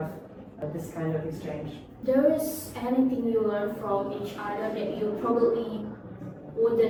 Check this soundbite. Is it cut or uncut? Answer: uncut